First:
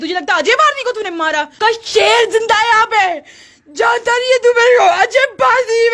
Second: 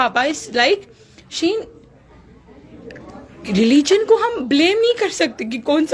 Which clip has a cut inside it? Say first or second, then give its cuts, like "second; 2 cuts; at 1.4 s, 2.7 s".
first; 1 cut; at 1.5 s